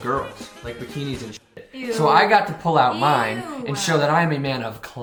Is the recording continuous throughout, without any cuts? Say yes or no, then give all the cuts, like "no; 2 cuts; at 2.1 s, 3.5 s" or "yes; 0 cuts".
yes; 0 cuts